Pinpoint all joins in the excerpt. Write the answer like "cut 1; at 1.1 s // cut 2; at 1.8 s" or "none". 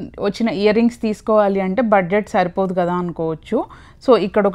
none